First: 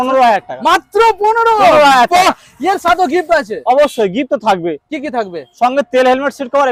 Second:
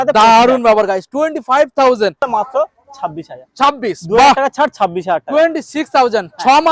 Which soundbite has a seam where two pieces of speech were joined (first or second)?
second